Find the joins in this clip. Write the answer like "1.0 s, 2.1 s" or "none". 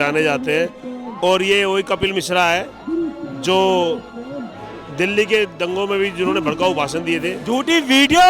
7.4 s